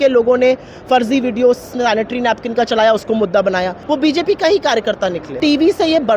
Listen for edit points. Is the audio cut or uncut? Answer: cut